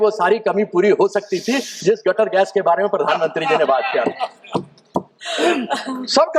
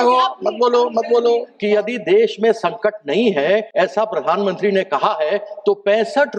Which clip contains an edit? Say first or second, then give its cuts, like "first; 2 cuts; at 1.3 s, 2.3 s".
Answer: second; 2 cuts; at 1.5 s, 3.7 s